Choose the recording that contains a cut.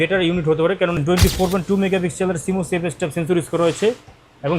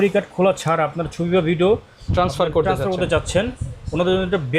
first; 1 cut; at 0.9 s

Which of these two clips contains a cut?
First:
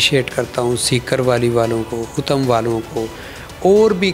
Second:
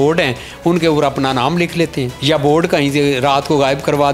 second; 1 cut; at 2.1 s

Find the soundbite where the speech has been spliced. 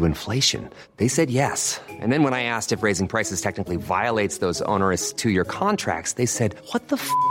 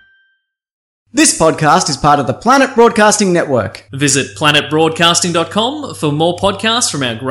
second; 1 cut; at 0.9 s

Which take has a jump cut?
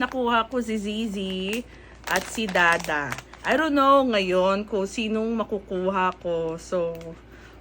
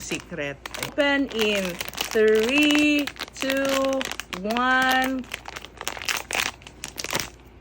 second; 1 cut; at 0.9 s

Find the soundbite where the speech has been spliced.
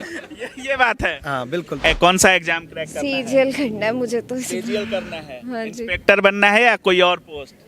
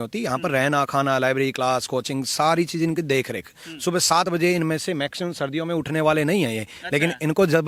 first; 1 cut; at 1.9 s

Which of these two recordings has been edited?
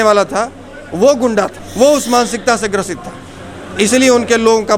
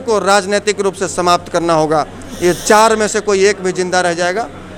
first; 1 cut; at 1.6 s

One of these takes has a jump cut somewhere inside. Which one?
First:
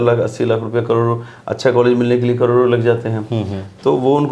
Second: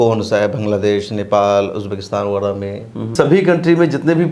second; 1 cut; at 3.1 s

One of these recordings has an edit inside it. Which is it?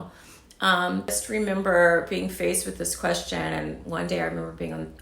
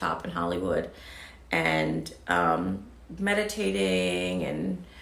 first; 1 cut; at 1.2 s

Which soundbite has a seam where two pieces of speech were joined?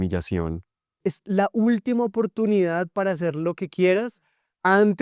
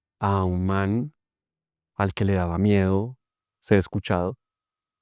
first; 1 cut; at 1.0 s

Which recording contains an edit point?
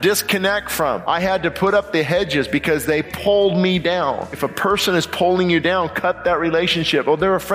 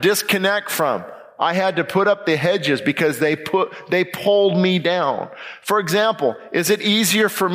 first; 3 cuts; at 1.0 s, 3.1 s, 4.5 s

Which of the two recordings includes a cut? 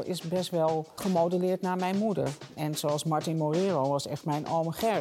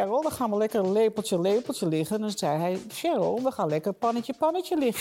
first; 2 cuts; at 1.0 s, 2.5 s

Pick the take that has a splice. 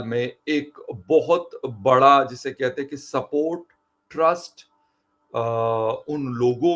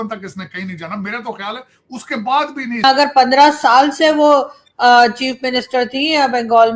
second; 1 cut; at 2.8 s

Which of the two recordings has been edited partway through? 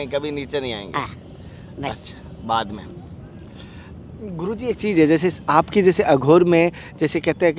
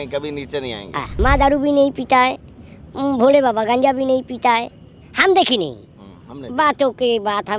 second; 1 cut; at 1.0 s

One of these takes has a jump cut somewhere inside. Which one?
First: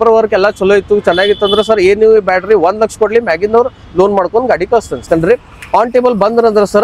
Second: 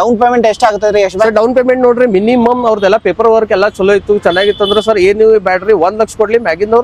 first; 1 cut; at 5.1 s

